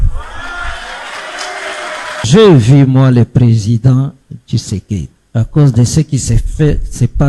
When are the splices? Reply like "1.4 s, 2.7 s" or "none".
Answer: 2.3 s, 5.2 s